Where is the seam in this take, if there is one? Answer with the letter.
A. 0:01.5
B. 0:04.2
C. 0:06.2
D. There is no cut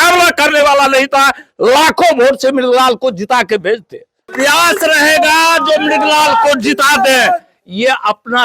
B